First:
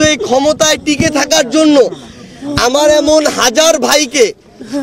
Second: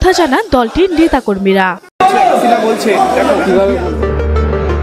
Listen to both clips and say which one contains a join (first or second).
second